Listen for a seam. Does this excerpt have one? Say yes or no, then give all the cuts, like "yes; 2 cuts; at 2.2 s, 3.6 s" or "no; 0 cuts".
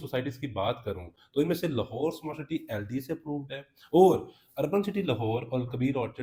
no; 0 cuts